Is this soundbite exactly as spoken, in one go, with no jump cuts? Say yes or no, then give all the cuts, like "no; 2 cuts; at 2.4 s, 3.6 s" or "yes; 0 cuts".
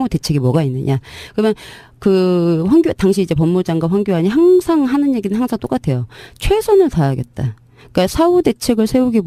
yes; 0 cuts